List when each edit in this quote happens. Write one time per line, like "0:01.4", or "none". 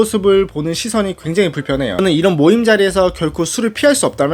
0:02.0